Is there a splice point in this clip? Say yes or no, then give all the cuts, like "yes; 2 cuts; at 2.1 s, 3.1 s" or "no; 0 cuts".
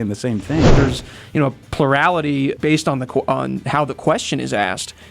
yes; 2 cuts; at 0.7 s, 2.6 s